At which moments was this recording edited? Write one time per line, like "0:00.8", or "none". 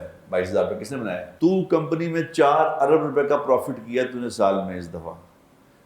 0:01.2

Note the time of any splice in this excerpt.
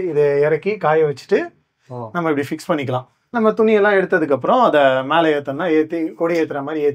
0:03.2

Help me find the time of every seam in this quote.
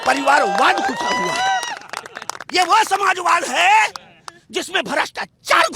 none

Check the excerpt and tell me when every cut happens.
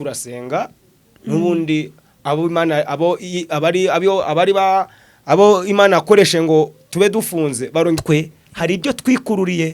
0:08.0

